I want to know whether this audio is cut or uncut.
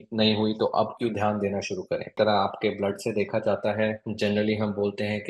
cut